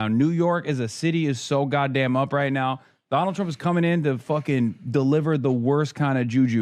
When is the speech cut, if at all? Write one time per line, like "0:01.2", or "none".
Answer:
none